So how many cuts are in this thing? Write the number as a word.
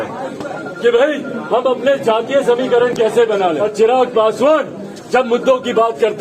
one